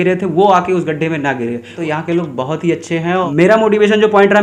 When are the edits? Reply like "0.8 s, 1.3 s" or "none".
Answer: 1.8 s, 3.3 s